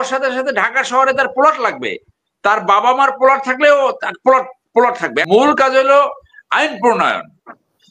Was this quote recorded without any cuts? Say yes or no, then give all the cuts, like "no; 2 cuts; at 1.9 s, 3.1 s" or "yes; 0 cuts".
no; 1 cut; at 5.2 s